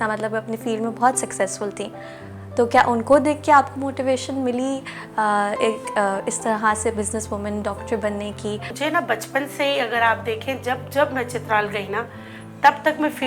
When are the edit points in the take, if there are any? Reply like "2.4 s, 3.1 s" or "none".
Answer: 8.7 s